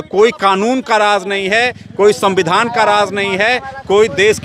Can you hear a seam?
no; 0 cuts

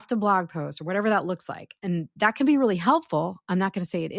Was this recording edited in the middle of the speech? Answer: no; 0 cuts

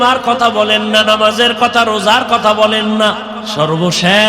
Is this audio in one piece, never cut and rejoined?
no; 1 cut; at 3.4 s

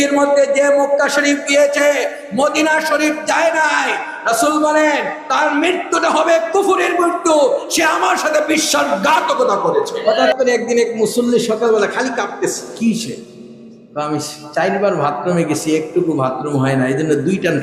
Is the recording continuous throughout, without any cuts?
no; 2 cuts; at 10.3 s, 12.6 s

